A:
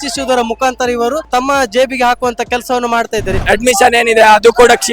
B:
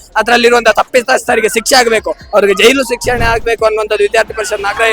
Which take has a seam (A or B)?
A